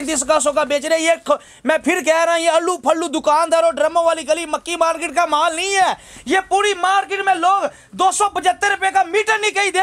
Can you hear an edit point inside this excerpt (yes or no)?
no